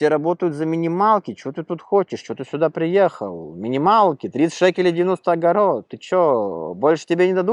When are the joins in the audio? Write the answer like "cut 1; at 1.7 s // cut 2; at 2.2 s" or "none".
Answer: none